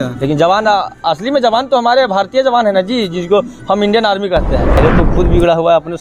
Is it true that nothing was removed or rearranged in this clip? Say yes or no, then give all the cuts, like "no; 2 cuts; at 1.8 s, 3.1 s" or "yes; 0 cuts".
no; 1 cut; at 4.8 s